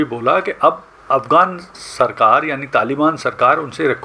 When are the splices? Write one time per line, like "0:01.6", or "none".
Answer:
none